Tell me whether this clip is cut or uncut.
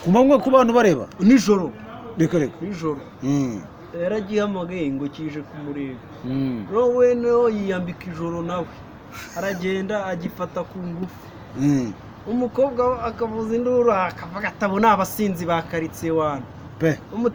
uncut